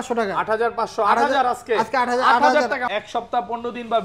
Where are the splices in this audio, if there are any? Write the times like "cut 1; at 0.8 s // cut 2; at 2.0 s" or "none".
cut 1; at 2.8 s